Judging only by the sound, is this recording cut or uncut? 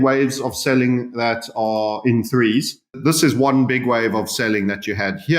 cut